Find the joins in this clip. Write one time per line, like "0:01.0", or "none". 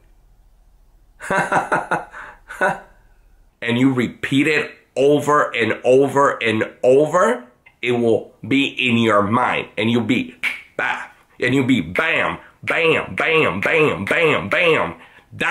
0:03.5

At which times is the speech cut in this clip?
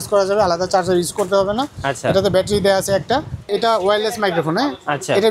0:03.5

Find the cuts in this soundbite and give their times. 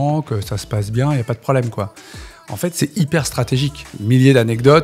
0:03.9

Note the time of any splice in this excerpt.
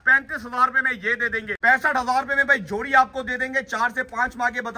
0:01.5

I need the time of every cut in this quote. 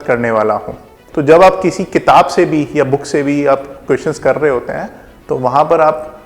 0:01.0

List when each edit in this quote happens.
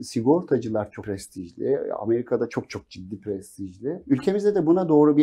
0:01.0
0:04.0

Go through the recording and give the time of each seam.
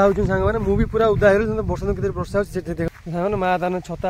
0:02.9

